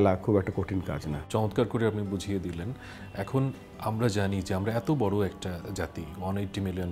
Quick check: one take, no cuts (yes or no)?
yes